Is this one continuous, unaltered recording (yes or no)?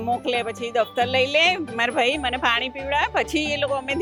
yes